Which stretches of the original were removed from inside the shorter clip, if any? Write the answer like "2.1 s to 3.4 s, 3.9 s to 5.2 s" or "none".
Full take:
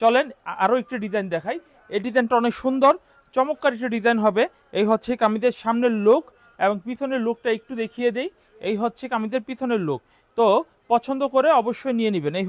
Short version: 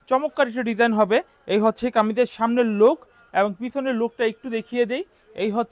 none